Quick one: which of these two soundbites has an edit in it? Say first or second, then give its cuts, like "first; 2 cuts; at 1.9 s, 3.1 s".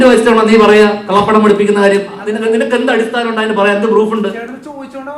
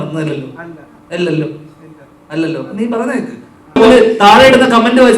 second; 1 cut; at 3.8 s